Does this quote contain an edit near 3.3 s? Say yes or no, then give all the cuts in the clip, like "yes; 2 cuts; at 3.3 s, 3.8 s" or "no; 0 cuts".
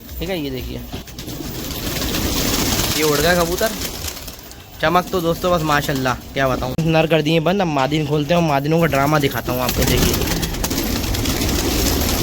no; 3 cuts; at 1.1 s, 6.7 s, 10.7 s